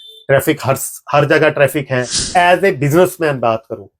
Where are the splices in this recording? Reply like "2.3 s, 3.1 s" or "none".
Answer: 2.2 s